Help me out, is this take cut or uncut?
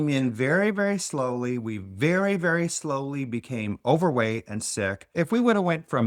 cut